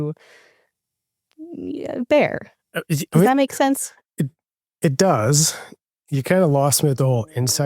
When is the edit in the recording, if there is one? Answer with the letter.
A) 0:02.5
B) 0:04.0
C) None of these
B